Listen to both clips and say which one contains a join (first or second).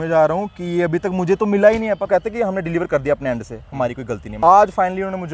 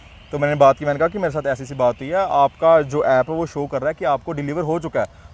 first